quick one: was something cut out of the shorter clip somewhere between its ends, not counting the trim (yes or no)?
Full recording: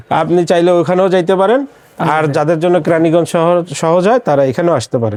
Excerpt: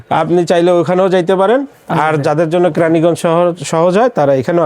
yes